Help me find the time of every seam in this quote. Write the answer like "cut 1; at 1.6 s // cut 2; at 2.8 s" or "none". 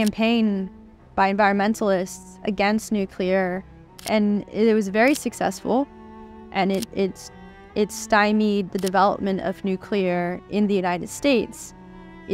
cut 1; at 4.0 s